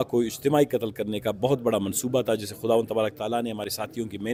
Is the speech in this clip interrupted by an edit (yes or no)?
no